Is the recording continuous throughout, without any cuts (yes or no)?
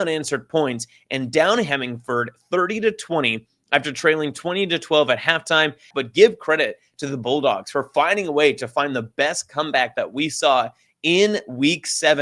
no